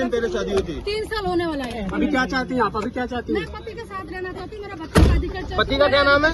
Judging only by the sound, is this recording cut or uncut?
uncut